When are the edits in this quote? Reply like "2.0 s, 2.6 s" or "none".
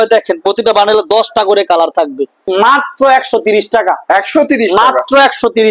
2.4 s